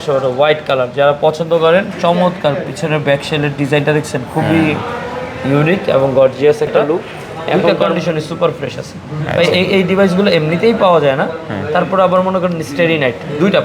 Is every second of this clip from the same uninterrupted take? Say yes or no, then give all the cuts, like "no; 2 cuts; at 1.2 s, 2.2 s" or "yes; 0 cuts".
no; 1 cut; at 7.7 s